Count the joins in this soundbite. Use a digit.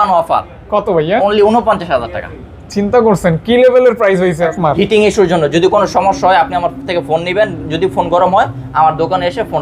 1